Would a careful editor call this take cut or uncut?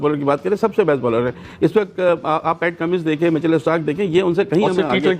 uncut